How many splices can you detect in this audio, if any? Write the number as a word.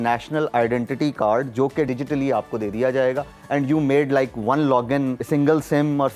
two